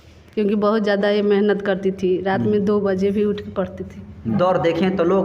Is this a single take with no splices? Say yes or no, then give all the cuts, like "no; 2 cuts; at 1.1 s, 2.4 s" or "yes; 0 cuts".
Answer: no; 1 cut; at 4.3 s